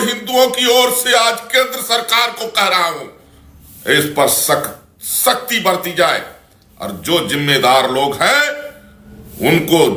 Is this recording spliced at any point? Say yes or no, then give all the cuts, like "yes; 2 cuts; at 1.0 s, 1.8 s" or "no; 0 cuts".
no; 0 cuts